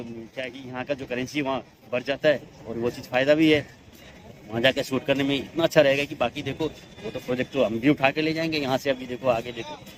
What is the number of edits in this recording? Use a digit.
0